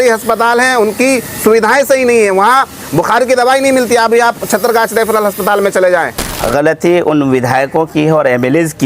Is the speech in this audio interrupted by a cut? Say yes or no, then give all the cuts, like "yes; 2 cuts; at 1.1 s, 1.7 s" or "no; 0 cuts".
yes; 1 cut; at 6.2 s